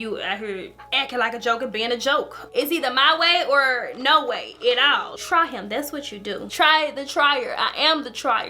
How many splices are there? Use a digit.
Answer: 2